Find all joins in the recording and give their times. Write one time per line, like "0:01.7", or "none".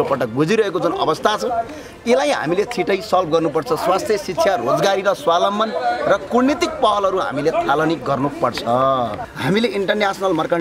0:09.3